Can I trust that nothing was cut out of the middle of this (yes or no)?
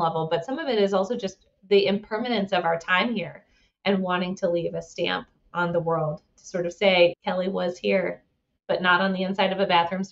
no